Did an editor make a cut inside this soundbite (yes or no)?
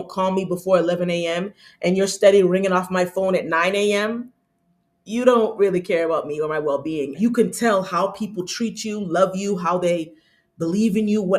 yes